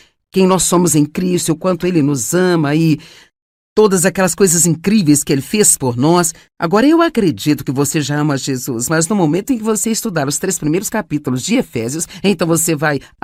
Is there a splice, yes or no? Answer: no